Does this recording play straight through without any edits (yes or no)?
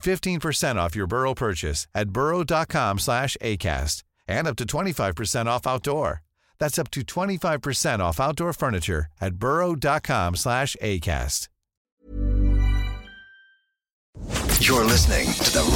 no